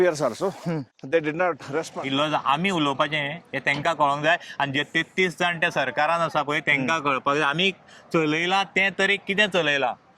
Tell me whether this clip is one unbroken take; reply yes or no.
no